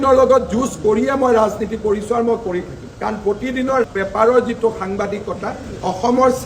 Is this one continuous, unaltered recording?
yes; 0 cuts

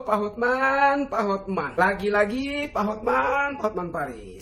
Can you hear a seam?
no; 0 cuts

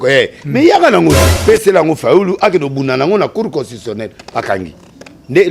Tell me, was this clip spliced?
yes; 1 cut; at 1.3 s

